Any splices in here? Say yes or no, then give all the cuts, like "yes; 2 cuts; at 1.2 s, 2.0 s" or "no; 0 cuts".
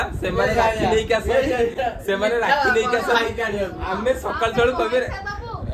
no; 0 cuts